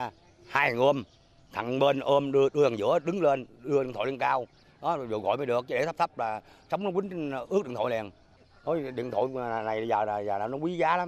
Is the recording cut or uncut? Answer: uncut